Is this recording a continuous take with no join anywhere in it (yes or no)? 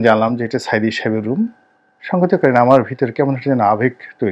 yes